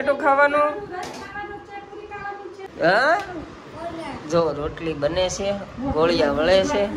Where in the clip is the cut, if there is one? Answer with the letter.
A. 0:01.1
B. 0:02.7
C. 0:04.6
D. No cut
B